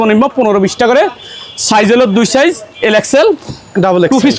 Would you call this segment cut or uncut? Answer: uncut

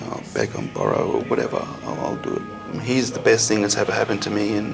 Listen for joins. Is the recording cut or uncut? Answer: cut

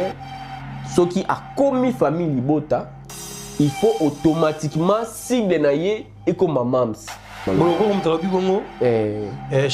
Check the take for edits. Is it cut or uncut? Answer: cut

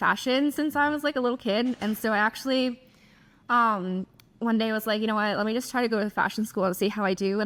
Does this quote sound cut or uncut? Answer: uncut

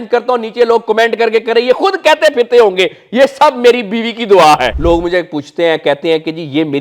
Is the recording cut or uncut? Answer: cut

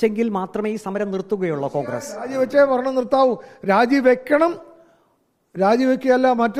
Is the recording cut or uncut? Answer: uncut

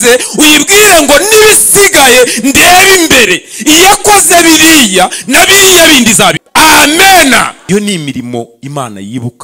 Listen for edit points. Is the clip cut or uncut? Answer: cut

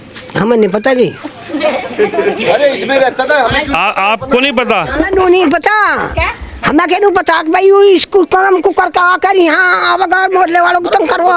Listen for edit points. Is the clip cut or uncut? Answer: uncut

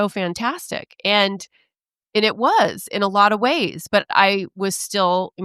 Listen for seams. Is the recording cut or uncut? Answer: uncut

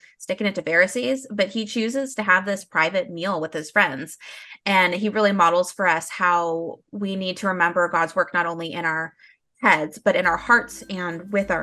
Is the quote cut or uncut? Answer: uncut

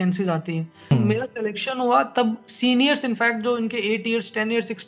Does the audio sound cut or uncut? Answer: cut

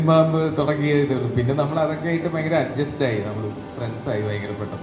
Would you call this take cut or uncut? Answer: uncut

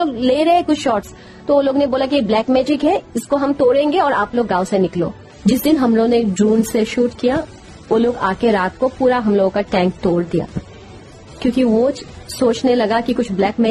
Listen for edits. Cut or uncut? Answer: cut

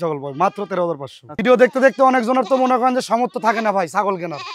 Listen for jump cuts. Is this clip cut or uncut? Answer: cut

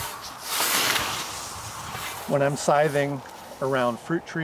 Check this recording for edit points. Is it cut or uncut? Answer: cut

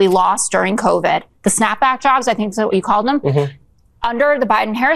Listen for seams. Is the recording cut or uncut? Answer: uncut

